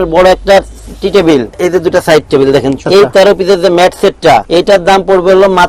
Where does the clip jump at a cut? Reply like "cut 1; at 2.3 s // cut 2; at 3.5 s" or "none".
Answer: cut 1; at 1.6 s // cut 2; at 2.8 s // cut 3; at 4.4 s